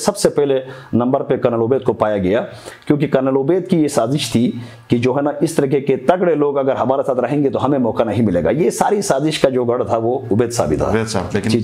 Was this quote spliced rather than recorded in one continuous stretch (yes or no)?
no